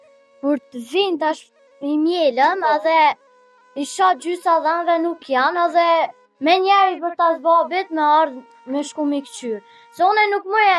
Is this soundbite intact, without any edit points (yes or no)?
yes